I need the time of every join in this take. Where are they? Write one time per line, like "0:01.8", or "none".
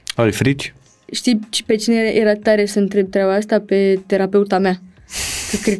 0:01.1

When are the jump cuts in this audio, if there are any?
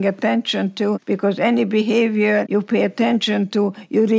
0:01.0
0:02.5

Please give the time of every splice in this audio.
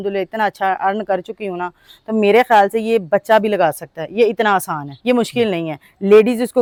none

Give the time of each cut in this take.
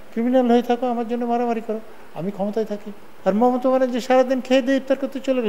0:03.0

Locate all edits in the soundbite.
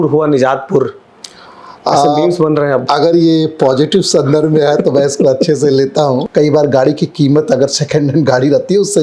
0:06.3

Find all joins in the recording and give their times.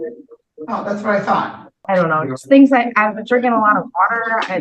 0:01.7

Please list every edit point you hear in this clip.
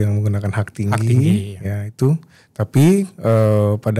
0:02.4

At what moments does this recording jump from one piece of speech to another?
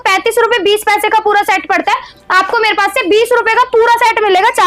none

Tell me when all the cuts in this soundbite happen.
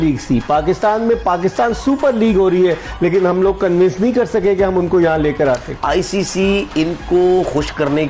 0:05.7

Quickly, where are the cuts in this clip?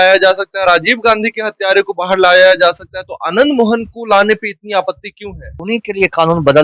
0:05.5

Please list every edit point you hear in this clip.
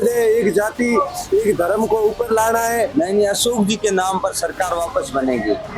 0:02.9

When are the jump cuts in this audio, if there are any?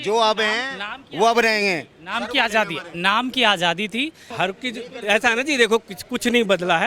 0:04.2

